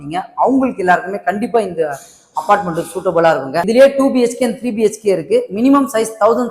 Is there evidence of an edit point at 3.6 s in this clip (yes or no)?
yes